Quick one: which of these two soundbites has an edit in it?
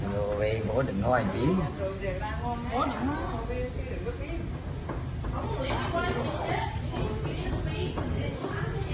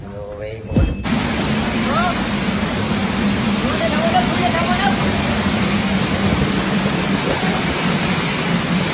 second; 1 cut; at 1.0 s

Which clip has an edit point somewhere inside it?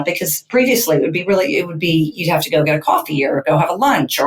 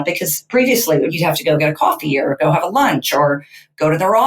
second; 1 cut; at 1.1 s

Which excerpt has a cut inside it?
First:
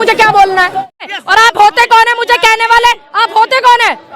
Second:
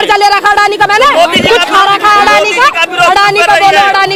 first; 1 cut; at 1.1 s

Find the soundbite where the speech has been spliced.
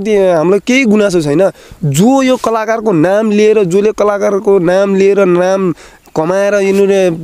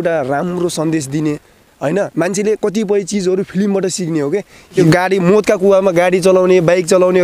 second; 1 cut; at 4.8 s

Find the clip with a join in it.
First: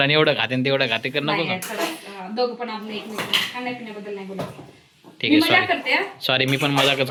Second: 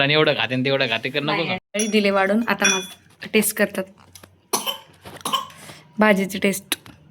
second; 1 cut; at 1.6 s

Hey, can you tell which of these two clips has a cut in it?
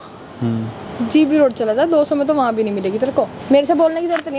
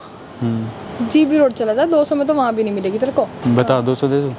first; 1 cut; at 3.3 s

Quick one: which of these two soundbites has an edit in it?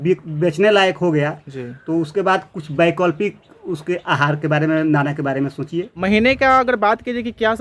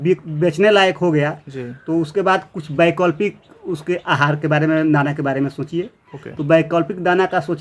first; 1 cut; at 5.9 s

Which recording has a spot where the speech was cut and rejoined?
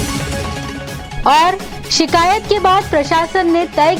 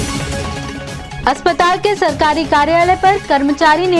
second; 1 cut; at 1.1 s

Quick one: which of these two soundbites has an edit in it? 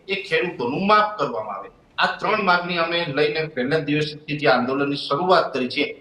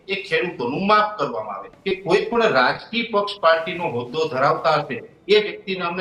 second; 1 cut; at 1.7 s

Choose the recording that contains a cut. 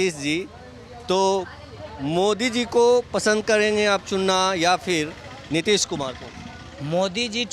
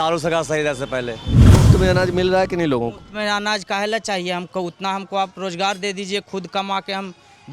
second; 1 cut; at 1.4 s

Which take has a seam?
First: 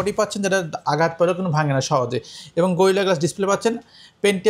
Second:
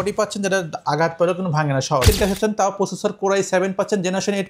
second; 1 cut; at 2.0 s

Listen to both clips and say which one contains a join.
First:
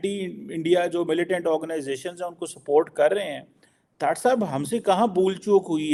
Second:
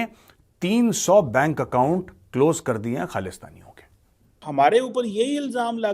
second; 1 cut; at 4.4 s

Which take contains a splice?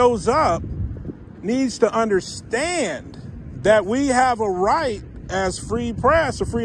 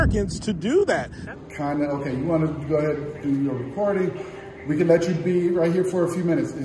second; 1 cut; at 1.2 s

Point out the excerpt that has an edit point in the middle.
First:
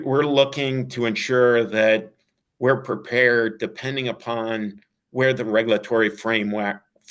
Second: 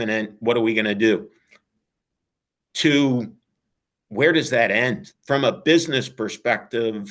second; 1 cut; at 5.1 s

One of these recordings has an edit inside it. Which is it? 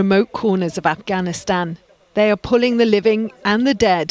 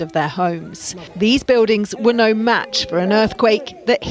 second; 1 cut; at 1.0 s

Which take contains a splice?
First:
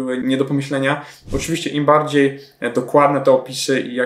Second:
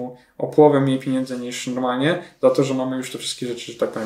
first; 1 cut; at 1.2 s

